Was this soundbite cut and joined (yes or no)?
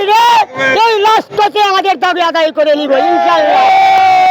no